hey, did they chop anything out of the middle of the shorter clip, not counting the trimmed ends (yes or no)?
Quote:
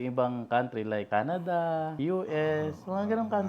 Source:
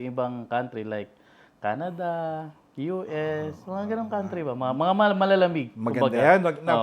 yes